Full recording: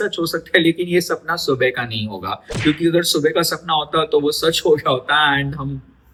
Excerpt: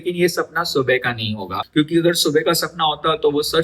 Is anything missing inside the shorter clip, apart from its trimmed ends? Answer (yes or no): yes